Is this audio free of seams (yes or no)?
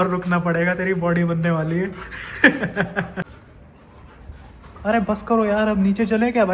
yes